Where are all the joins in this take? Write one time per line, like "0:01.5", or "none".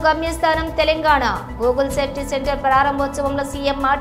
none